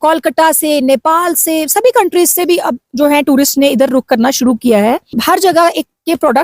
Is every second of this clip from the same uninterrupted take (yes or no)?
no